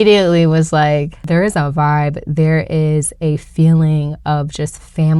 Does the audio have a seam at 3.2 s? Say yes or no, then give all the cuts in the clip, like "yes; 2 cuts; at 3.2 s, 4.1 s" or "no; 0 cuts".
no; 1 cut; at 1.2 s